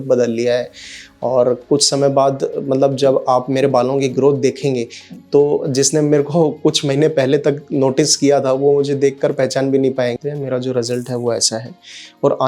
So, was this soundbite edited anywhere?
yes; 1 cut; at 10.2 s

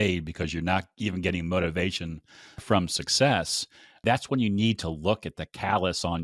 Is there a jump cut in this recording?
yes; 1 cut; at 4.0 s

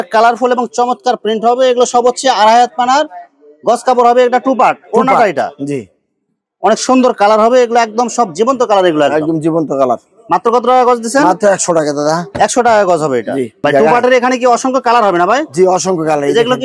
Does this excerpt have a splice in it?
no; 0 cuts

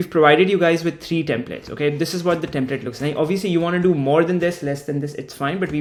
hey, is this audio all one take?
yes; 0 cuts

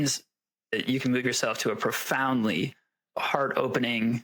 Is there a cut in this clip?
no; 0 cuts

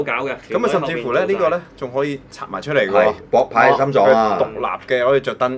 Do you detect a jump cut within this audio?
no; 0 cuts

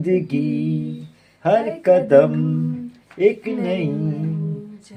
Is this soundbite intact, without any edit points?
yes; 0 cuts

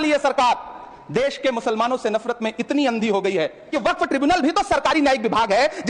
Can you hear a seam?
yes; 1 cut; at 3.7 s

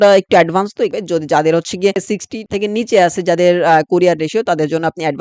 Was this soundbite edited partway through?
yes; 1 cut; at 0.9 s

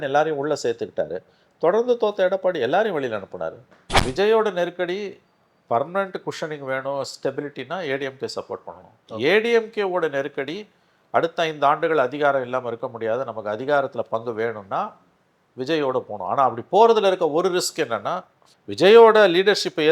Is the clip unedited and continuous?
no; 1 cut; at 4.0 s

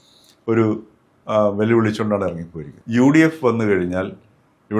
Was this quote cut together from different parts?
yes; 1 cut; at 2.7 s

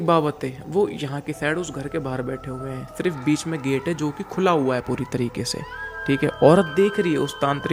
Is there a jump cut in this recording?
no; 0 cuts

